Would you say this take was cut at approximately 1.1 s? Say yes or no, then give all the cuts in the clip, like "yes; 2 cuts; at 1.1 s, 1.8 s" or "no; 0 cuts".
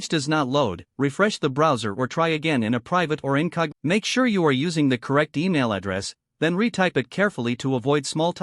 no; 1 cut; at 3.7 s